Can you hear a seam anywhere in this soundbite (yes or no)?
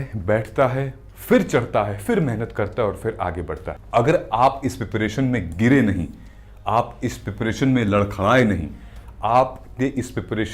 yes